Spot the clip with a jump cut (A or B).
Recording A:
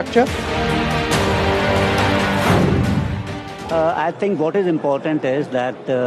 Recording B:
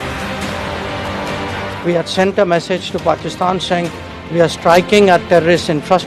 A